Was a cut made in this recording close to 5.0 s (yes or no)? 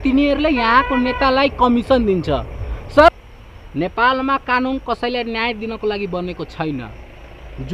no